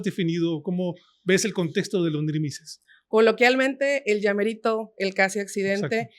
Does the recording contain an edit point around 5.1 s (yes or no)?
no